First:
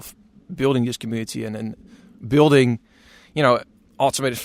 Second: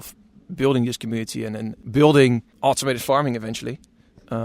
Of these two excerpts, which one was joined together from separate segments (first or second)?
second